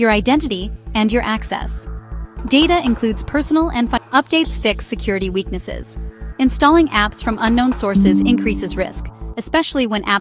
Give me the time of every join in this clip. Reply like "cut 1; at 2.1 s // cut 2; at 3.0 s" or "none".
cut 1; at 4.0 s